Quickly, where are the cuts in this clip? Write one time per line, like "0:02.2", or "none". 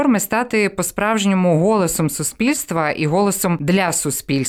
0:03.6